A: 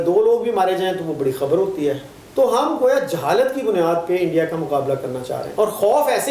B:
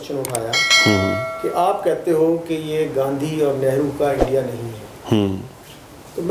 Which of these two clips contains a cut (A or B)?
A